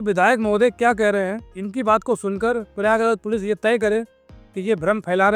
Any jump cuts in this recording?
no; 0 cuts

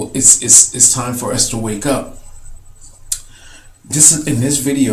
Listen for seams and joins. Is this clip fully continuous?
no; 1 cut; at 1.1 s

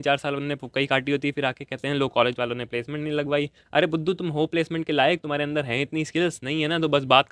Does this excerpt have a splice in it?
no; 0 cuts

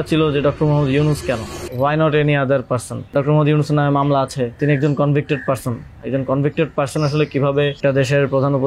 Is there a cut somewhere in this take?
yes; 4 cuts; at 1.6 s, 3.1 s, 4.6 s, 7.8 s

